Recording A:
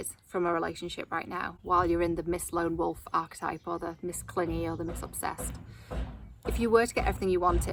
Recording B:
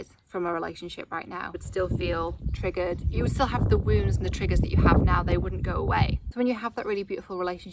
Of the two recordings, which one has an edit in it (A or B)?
B